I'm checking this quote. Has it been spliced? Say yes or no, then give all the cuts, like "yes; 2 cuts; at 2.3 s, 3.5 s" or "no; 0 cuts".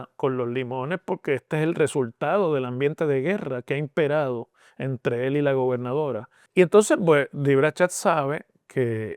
yes; 1 cut; at 6.4 s